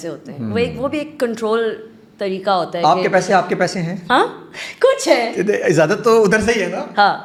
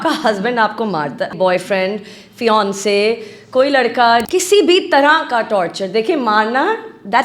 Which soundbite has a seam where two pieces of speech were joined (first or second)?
second